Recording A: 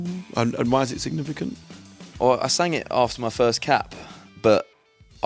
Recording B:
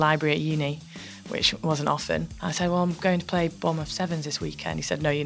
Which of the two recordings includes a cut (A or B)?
B